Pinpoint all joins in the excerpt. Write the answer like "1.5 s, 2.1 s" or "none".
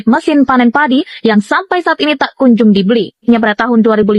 3.2 s